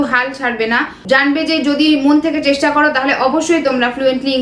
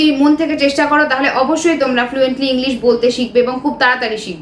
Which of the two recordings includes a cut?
first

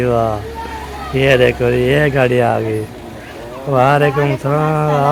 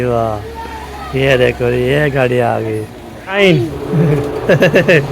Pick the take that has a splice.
second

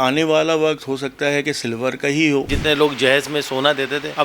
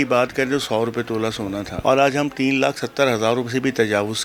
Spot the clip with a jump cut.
first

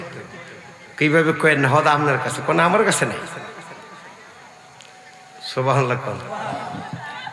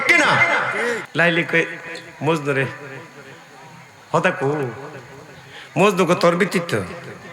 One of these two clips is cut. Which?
second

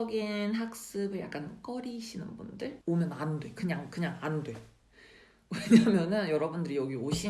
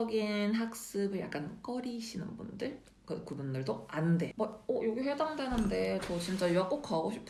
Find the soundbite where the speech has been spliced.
first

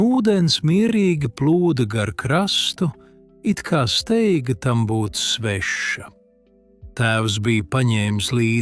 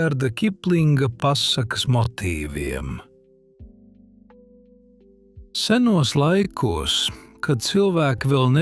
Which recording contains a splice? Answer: second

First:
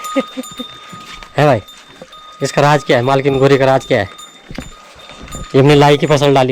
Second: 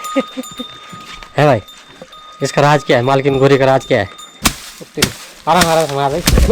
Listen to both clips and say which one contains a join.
second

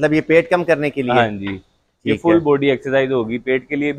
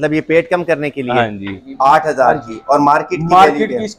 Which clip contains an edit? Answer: second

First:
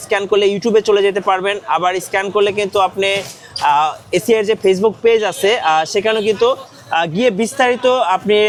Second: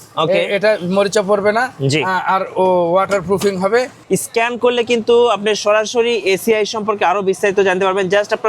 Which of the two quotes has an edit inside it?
second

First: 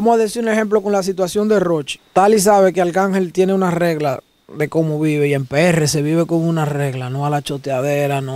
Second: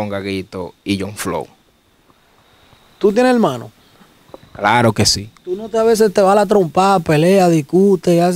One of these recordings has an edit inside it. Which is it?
first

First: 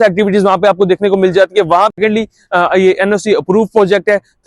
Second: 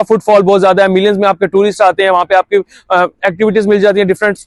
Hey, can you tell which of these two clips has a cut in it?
first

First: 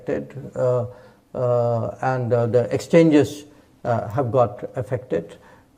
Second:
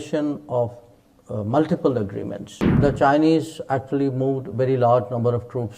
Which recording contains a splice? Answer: second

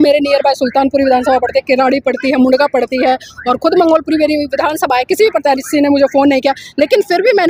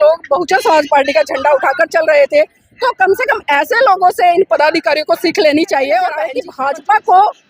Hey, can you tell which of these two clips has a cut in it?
second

